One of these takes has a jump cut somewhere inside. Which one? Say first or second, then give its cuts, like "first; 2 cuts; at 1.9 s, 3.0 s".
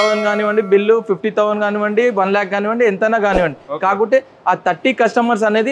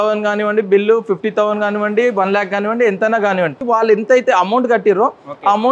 second; 1 cut; at 3.6 s